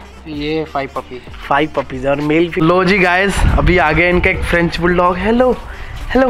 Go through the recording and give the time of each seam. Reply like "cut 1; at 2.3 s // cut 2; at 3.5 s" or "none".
cut 1; at 2.5 s